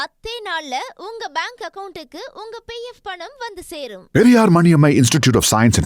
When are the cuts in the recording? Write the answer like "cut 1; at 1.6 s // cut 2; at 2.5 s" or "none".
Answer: none